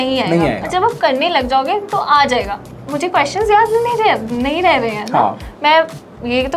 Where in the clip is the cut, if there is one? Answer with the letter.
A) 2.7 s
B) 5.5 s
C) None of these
A